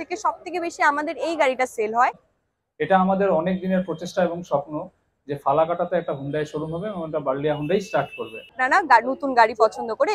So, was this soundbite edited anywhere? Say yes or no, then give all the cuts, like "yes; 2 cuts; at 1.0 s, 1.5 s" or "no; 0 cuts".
yes; 2 cuts; at 2.3 s, 8.6 s